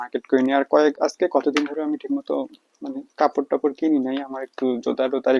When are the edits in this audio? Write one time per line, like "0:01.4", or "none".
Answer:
none